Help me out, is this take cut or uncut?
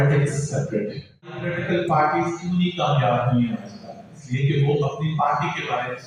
cut